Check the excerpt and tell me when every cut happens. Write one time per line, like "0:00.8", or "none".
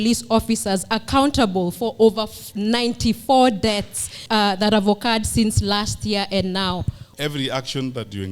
0:04.1
0:07.1